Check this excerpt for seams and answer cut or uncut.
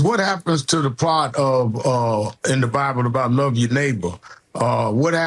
uncut